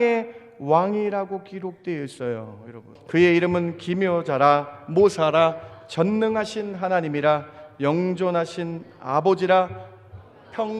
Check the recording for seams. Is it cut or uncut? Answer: cut